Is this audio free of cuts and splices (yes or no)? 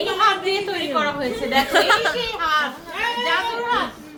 yes